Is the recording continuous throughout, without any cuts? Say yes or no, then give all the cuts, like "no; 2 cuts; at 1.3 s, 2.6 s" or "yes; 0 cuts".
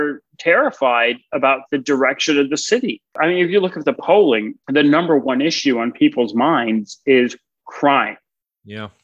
yes; 0 cuts